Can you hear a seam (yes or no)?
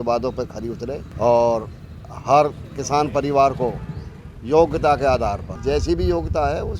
yes